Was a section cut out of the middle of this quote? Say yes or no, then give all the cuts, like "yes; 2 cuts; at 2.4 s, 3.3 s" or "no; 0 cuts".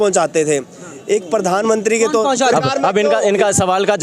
yes; 1 cut; at 2.5 s